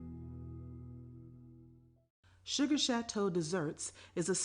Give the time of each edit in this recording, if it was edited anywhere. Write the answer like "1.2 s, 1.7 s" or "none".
1.8 s

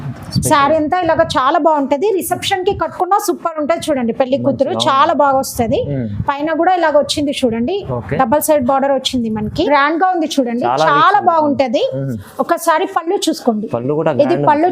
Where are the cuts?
9.7 s

